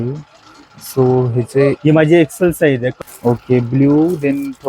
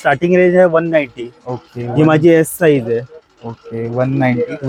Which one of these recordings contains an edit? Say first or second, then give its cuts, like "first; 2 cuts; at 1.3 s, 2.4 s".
first; 1 cut; at 2.9 s